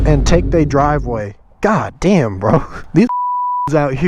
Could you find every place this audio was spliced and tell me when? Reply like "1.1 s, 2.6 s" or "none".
2.8 s